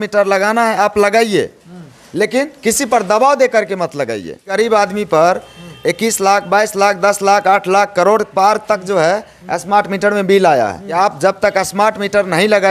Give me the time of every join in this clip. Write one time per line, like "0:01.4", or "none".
0:04.5
0:10.8